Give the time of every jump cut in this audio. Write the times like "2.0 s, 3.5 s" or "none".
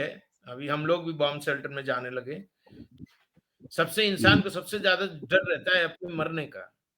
2.8 s